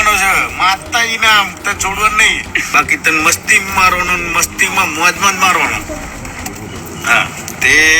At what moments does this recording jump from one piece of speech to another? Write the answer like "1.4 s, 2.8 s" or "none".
2.6 s